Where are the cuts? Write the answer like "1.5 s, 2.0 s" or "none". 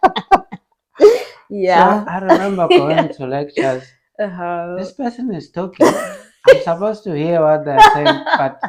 none

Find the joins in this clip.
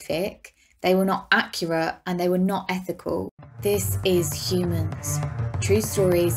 3.3 s

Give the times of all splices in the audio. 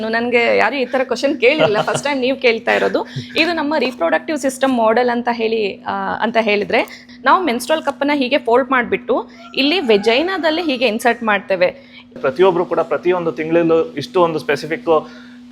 7.0 s, 12.1 s

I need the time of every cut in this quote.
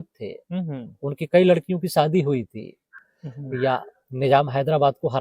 3.0 s

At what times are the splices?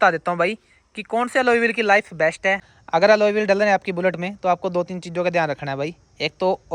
2.7 s

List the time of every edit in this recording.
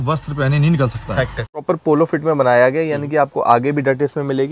1.6 s

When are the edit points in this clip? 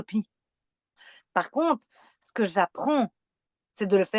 1.0 s

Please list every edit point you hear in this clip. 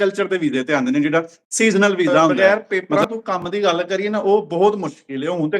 2.4 s

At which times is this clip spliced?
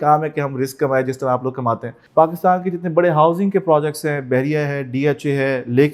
1.9 s

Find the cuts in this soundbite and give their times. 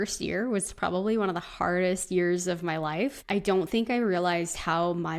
3.2 s

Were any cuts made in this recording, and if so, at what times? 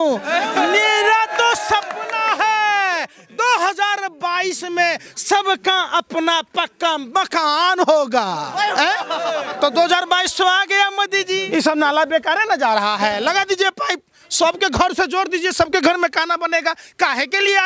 11.4 s

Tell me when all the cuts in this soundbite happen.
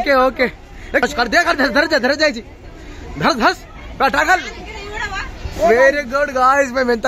1.0 s

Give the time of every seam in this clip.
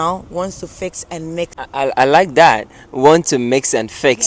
1.6 s

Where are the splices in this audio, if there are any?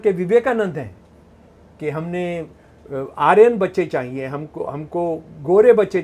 none

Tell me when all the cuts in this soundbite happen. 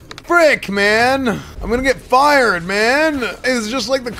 1.5 s, 3.4 s

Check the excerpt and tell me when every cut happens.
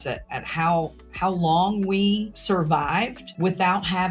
2.3 s, 3.2 s

